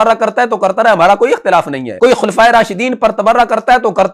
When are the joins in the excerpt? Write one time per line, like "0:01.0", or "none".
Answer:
0:01.8